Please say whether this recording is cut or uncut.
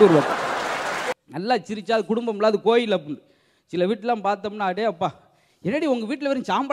cut